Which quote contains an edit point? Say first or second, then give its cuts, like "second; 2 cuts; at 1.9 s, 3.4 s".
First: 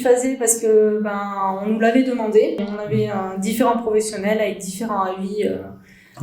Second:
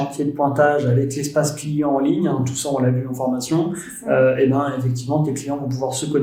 first; 1 cut; at 2.6 s